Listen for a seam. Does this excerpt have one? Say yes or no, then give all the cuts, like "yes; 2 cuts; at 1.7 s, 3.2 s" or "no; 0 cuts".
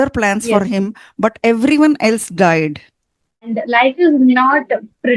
yes; 1 cut; at 3.6 s